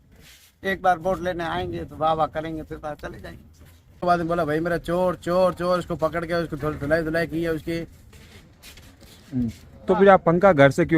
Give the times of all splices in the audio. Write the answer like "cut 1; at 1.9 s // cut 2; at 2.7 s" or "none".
cut 1; at 4.0 s